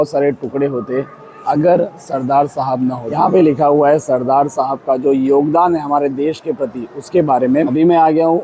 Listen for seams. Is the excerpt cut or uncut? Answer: cut